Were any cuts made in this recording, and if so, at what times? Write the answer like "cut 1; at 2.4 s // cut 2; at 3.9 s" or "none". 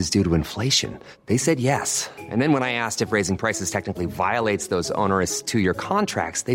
none